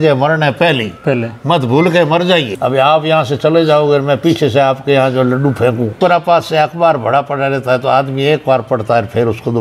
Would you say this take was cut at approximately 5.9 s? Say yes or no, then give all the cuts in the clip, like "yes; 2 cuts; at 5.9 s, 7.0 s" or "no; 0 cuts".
yes; 2 cuts; at 2.5 s, 5.9 s